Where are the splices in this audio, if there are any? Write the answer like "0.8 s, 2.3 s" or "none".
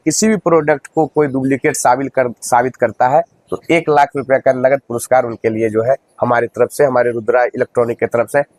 none